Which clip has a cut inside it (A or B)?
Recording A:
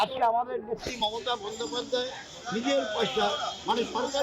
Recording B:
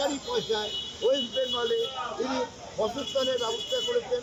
A